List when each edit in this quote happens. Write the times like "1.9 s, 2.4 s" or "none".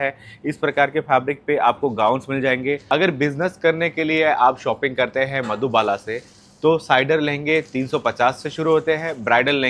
2.8 s